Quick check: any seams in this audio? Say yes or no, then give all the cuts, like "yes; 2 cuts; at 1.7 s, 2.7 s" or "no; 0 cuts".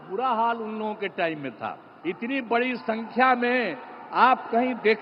yes; 1 cut; at 1.9 s